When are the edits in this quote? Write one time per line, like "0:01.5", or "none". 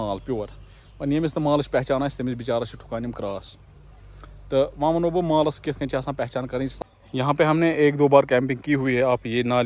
0:06.7